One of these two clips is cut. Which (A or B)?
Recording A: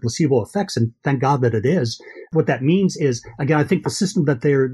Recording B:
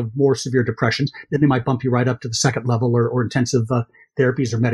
A